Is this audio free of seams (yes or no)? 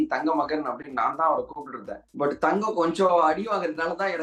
yes